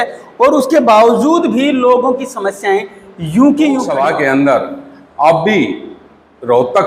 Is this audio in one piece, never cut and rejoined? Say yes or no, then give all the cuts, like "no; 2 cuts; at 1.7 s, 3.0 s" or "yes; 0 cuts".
no; 1 cut; at 3.9 s